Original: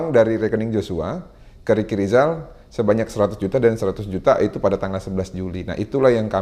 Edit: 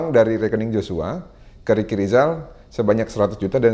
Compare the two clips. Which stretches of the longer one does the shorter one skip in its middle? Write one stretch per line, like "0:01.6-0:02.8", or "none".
none